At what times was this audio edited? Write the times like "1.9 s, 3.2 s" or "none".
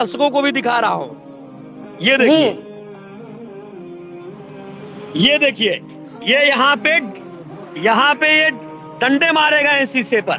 2.6 s, 5.1 s